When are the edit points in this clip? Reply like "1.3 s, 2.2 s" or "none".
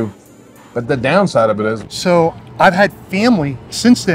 1.9 s

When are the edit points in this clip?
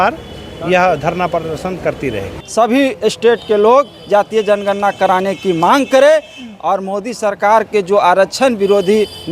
2.4 s

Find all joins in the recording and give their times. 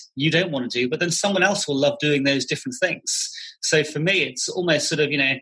none

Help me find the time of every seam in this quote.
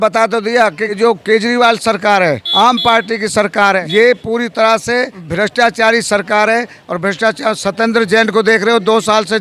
1.0 s, 2.4 s, 3.8 s, 5.2 s

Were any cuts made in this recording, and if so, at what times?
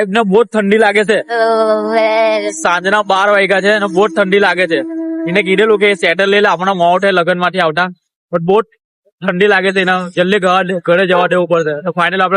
none

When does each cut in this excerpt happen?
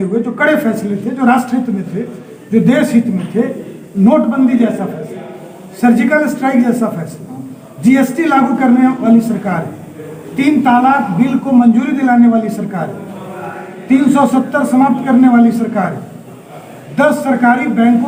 none

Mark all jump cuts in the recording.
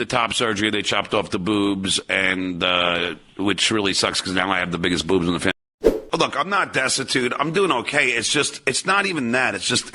6.0 s

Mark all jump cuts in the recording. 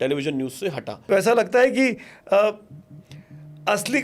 0.9 s

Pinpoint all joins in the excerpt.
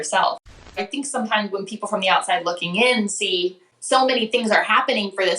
0.8 s, 3.7 s

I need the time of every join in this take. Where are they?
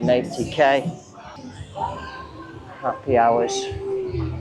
1.3 s

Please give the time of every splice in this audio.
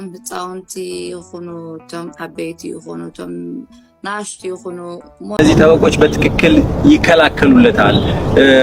5.4 s

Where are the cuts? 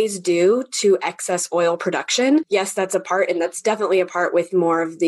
2.5 s

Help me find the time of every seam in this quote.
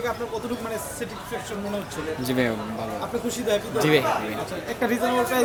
none

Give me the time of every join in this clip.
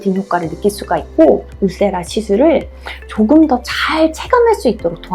1.5 s

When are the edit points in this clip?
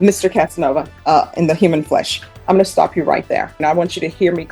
0.9 s, 3.6 s

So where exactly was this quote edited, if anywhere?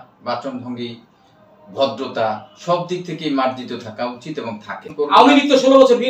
4.9 s

